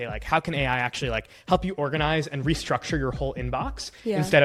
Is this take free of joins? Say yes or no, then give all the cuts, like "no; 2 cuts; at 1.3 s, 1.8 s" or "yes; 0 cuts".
yes; 0 cuts